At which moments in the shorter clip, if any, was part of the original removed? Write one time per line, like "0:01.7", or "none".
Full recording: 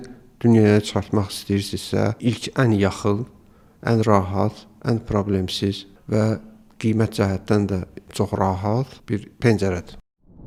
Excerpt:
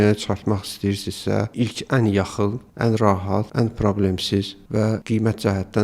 0:02.7
0:03.5
0:04.7